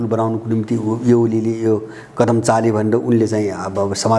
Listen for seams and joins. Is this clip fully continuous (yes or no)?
yes